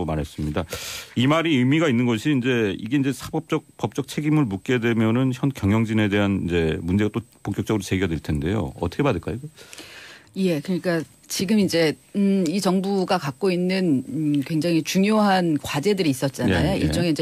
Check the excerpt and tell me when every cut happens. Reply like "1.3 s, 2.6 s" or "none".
none